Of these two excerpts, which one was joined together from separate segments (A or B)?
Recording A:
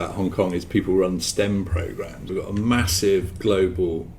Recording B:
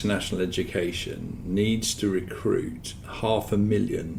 A